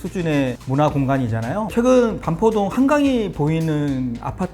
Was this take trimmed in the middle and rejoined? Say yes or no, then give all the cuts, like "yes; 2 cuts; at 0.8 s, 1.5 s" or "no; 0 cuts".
yes; 1 cut; at 1.7 s